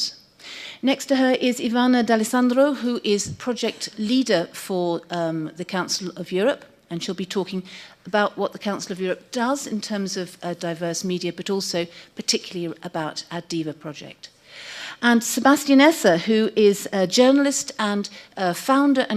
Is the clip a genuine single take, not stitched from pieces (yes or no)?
yes